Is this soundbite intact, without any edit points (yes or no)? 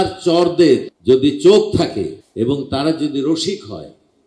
no